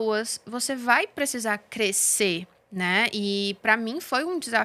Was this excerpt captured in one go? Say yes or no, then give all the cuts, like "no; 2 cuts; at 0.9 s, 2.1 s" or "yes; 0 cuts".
yes; 0 cuts